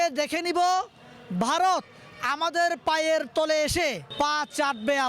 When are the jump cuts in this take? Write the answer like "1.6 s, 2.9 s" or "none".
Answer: 4.0 s